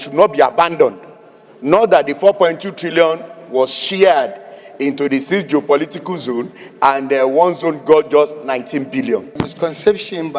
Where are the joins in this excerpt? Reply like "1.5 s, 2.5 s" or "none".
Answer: 9.4 s